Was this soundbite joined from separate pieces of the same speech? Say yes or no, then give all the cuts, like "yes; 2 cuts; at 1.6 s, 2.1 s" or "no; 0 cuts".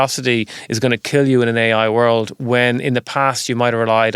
no; 0 cuts